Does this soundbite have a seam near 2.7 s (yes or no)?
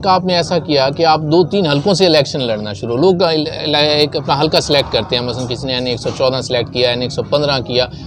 no